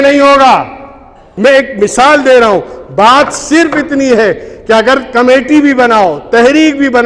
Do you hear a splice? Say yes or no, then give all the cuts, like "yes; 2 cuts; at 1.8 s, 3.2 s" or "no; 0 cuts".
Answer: yes; 1 cut; at 1.4 s